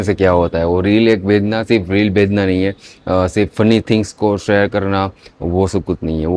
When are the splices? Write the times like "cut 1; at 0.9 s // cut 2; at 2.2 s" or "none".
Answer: none